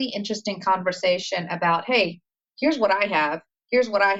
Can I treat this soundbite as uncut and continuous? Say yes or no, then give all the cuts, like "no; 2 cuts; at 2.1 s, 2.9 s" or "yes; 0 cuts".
yes; 0 cuts